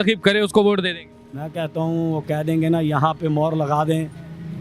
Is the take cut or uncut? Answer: uncut